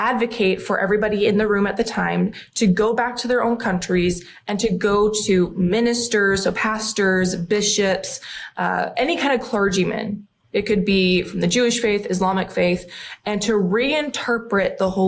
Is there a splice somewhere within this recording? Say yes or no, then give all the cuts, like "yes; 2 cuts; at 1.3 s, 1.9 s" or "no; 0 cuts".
no; 0 cuts